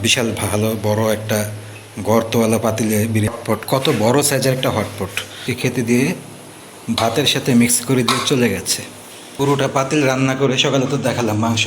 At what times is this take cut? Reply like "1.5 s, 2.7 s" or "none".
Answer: 3.3 s, 5.5 s, 9.3 s

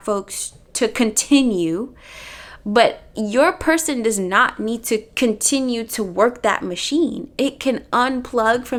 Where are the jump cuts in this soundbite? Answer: none

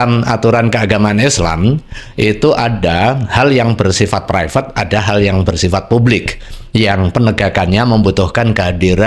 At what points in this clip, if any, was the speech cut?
none

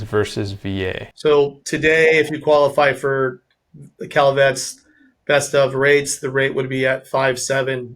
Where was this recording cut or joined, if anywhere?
1.1 s

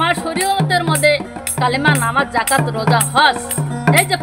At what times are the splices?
none

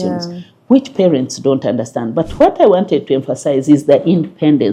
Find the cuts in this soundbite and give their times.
none

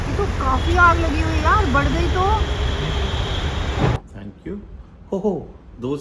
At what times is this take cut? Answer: 4.0 s

